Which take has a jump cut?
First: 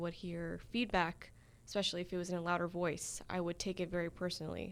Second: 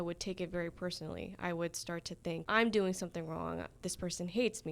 second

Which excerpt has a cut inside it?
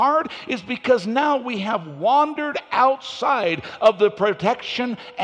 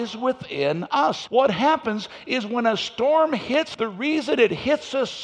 second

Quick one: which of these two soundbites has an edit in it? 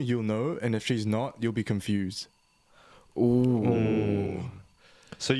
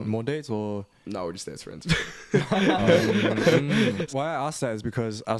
second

